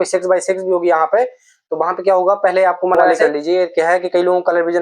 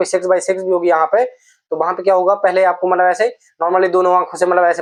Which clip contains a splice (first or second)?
first